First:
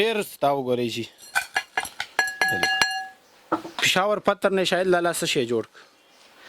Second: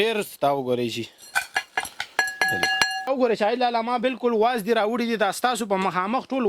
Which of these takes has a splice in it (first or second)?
second